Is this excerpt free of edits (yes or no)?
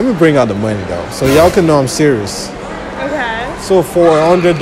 yes